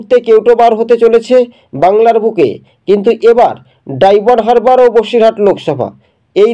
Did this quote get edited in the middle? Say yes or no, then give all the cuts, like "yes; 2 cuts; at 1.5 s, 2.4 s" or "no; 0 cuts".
no; 0 cuts